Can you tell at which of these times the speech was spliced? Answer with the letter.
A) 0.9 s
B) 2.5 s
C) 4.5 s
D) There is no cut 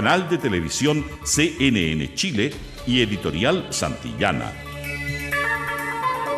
C